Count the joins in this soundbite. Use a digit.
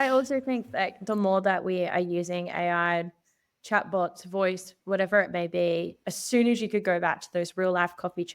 1